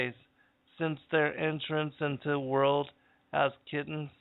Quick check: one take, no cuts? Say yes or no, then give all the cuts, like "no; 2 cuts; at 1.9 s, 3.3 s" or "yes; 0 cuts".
yes; 0 cuts